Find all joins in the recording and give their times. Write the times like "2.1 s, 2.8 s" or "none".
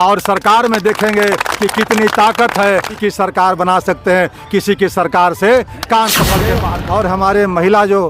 2.9 s, 6.6 s